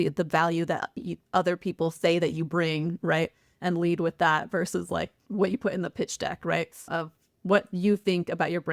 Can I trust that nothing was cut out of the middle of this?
no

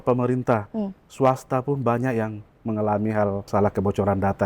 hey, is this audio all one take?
no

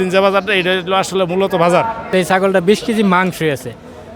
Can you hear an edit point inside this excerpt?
yes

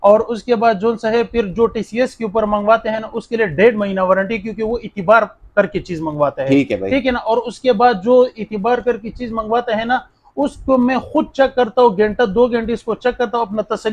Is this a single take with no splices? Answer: yes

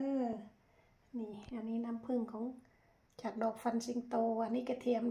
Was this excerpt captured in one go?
yes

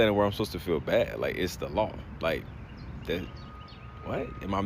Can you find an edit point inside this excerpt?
no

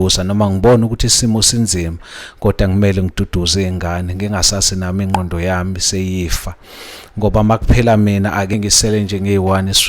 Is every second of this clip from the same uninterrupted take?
no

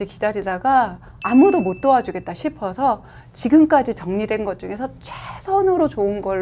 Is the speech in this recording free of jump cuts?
yes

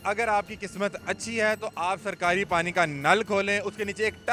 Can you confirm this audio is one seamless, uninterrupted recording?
yes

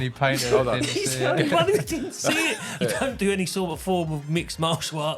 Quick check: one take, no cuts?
no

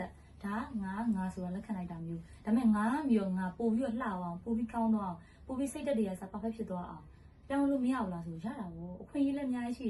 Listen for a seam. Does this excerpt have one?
no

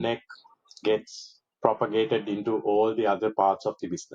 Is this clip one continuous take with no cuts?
yes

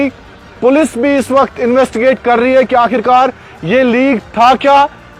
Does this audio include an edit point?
no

